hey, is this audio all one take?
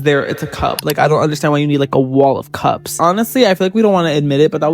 no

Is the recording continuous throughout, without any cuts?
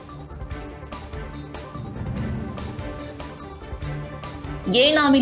no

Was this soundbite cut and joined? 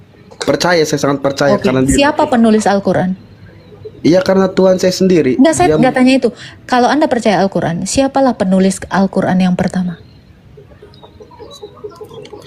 no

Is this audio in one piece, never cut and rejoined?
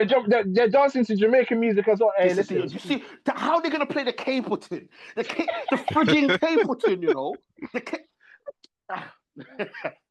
yes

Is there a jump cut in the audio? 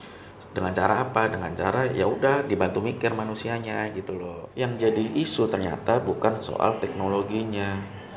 yes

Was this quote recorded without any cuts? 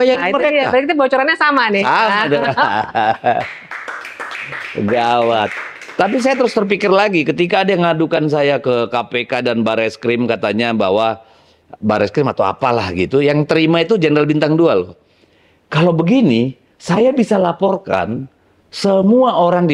yes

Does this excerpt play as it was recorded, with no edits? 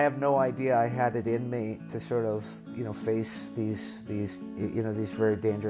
no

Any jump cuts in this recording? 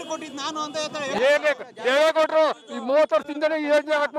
no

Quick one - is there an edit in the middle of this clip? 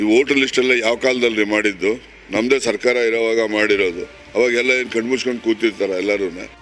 no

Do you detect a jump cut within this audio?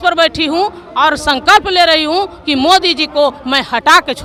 no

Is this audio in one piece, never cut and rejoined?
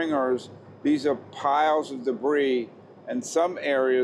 yes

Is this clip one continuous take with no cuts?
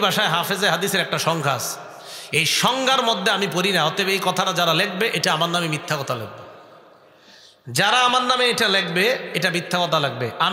yes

